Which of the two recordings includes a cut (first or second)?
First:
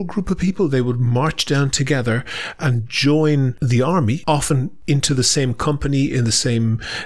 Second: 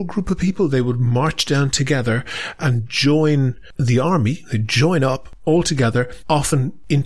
first